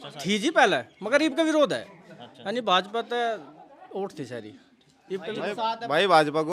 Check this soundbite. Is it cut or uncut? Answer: uncut